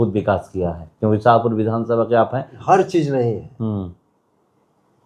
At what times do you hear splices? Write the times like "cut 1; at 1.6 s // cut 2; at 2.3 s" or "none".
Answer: cut 1; at 2.5 s